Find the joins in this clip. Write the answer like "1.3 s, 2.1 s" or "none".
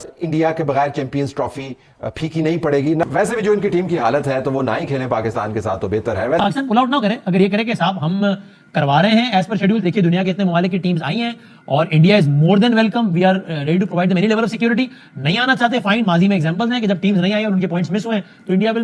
3.1 s, 6.4 s